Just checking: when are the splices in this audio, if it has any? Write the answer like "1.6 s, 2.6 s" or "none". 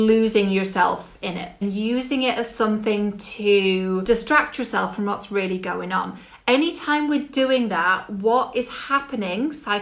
1.6 s, 4.0 s